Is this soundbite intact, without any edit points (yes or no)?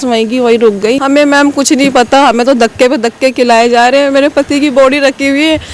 no